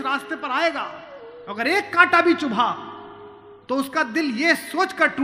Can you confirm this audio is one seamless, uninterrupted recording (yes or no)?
yes